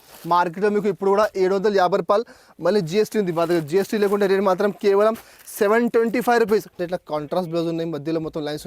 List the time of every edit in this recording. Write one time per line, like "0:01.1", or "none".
0:06.8